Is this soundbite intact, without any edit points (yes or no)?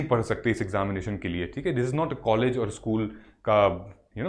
yes